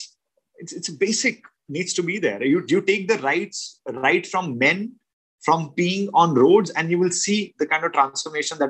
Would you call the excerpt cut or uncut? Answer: uncut